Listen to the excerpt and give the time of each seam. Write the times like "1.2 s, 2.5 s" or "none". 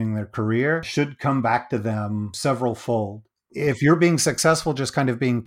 0.9 s, 2.3 s, 3.5 s